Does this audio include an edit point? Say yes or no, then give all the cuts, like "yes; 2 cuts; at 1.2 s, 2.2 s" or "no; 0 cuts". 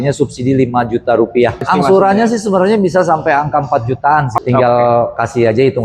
yes; 2 cuts; at 1.7 s, 4.4 s